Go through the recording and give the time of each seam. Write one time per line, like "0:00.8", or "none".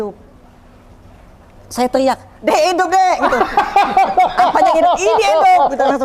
none